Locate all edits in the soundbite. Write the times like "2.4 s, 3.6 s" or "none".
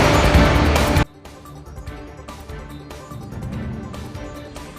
none